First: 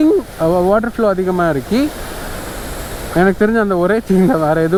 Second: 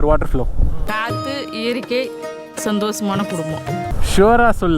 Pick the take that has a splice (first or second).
second